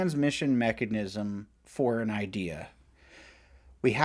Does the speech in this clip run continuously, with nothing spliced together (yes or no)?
yes